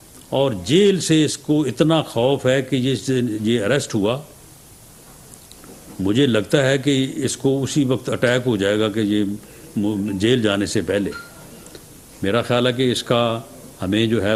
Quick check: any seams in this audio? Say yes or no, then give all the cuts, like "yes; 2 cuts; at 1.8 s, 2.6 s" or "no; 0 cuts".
no; 0 cuts